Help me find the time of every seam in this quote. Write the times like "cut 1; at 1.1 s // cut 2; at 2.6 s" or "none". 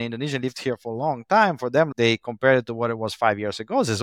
cut 1; at 1.9 s